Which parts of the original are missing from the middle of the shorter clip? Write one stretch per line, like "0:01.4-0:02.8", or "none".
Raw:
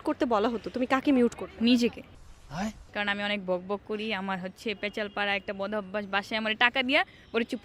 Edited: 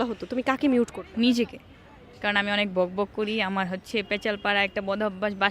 0:02.5-0:02.8